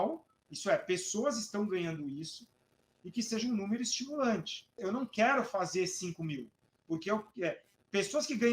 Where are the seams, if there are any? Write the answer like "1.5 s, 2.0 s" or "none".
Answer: 4.7 s